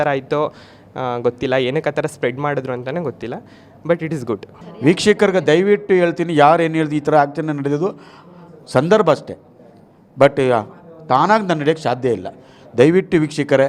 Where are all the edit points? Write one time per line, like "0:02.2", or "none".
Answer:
0:04.5